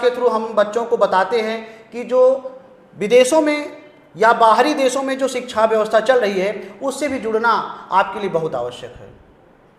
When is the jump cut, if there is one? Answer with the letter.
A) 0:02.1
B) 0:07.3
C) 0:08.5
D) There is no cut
D